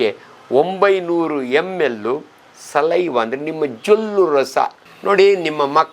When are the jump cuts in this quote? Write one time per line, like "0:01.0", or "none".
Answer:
0:04.8